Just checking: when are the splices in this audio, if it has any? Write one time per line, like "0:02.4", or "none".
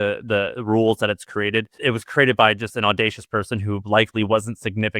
0:01.7